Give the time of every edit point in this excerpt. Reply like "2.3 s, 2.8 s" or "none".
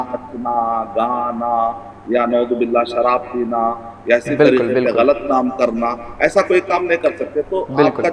none